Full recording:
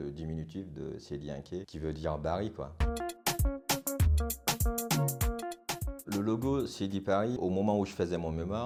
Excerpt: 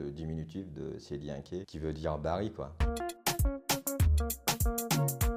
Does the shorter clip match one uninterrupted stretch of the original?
yes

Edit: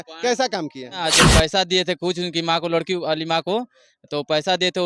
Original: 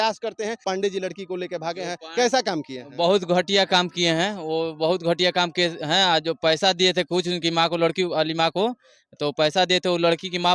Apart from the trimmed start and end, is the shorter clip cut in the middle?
yes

